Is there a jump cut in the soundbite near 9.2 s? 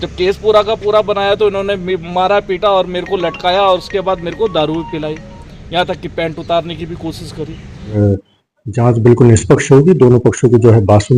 no; 1 cut; at 8.0 s

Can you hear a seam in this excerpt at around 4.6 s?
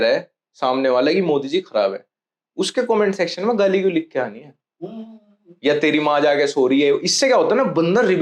no; 0 cuts

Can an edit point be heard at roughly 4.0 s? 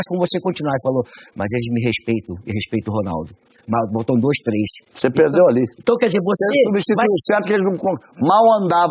yes; 1 cut; at 4.0 s

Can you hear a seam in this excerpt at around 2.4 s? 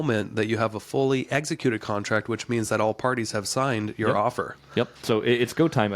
no; 1 cut; at 5.0 s

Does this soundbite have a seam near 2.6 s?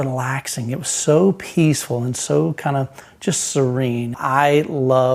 no; 1 cut; at 4.2 s

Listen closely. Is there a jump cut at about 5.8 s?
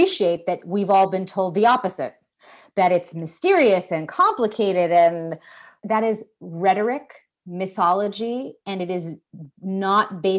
yes; 1 cut; at 5.8 s

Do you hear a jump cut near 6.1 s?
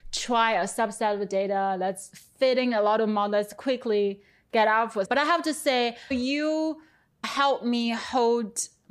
yes; 2 cuts; at 5.1 s, 6.1 s

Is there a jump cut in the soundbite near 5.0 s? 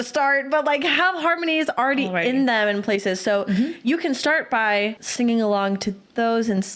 yes; 1 cut; at 5.0 s

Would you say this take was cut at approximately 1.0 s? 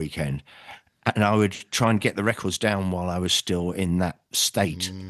no; 0 cuts

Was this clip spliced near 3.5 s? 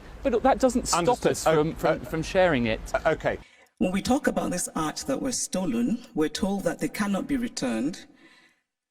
yes; 1 cut; at 3.5 s

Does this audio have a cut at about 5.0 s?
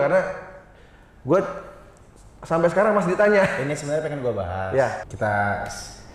yes; 1 cut; at 5.0 s

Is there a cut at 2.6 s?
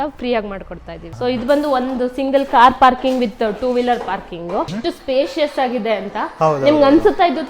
no; 2 cuts; at 1.1 s, 4.8 s

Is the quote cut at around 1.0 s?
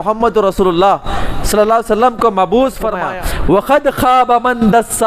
no; 1 cut; at 3.0 s

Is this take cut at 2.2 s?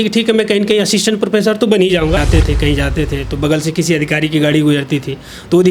yes; 1 cut; at 2.2 s

